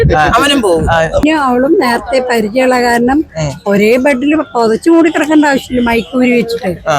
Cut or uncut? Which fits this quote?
cut